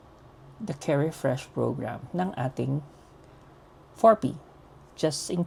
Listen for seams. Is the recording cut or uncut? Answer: uncut